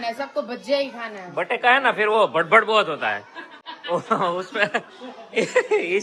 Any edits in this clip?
no; 0 cuts

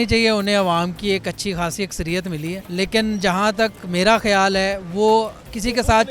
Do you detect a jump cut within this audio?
yes; 1 cut; at 2.6 s

